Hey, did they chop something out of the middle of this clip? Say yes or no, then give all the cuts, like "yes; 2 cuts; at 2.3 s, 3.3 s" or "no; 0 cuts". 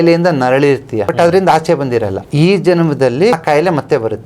yes; 3 cuts; at 1.1 s, 2.2 s, 3.3 s